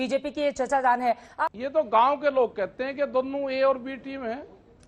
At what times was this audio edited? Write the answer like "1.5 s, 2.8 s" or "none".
1.3 s